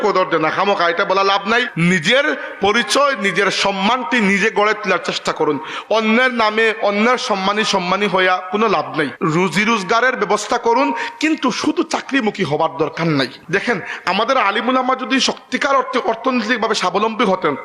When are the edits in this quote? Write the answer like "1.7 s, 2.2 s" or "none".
1.7 s, 9.1 s, 13.4 s

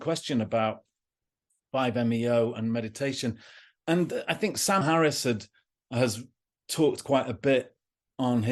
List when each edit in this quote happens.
4.8 s

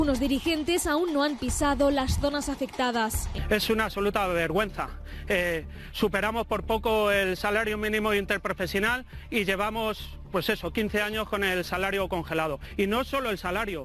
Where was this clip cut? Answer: 3.3 s

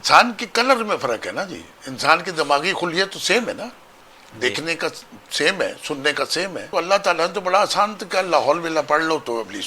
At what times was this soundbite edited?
6.7 s

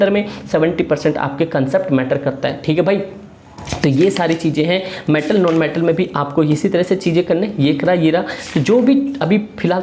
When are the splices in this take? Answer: none

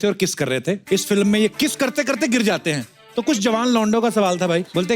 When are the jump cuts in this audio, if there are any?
0.8 s, 1.5 s

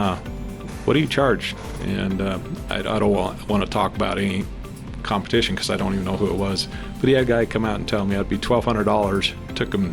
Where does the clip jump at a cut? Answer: none

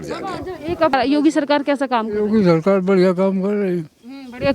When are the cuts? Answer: 0.9 s

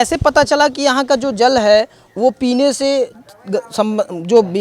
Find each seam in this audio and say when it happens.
none

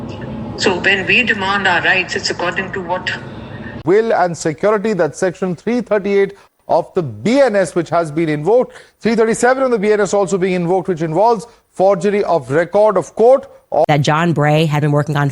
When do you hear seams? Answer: 3.8 s, 13.8 s

